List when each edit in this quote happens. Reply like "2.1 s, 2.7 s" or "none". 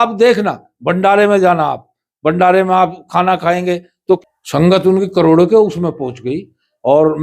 4.2 s